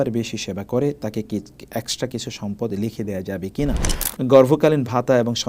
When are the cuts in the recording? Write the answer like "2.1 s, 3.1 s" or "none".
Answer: 4.0 s